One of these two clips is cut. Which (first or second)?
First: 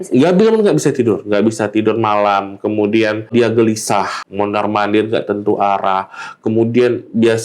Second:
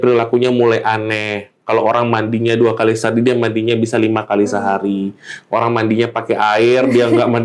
first